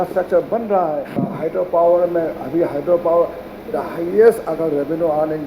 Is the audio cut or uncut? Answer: cut